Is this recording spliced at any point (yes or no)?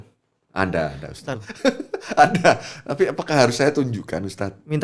yes